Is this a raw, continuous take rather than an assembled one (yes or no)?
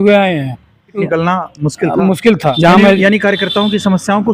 no